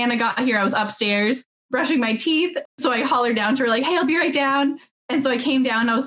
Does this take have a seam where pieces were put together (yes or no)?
yes